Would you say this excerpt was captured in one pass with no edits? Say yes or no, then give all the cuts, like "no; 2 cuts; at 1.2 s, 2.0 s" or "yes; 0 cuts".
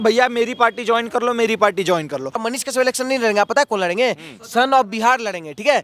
no; 1 cut; at 2.4 s